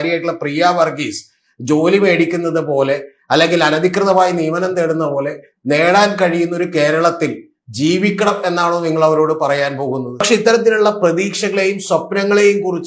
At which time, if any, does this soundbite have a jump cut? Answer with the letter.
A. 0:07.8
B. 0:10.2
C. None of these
B